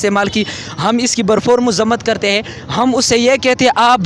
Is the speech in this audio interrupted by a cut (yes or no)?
no